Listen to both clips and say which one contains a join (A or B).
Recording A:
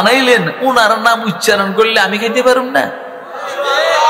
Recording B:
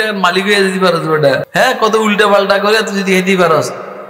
B